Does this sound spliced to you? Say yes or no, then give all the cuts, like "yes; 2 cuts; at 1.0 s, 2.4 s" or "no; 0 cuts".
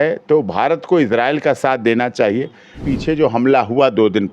yes; 1 cut; at 2.8 s